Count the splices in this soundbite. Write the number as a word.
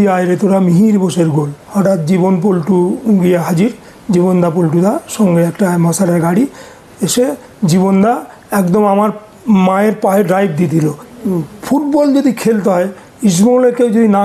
three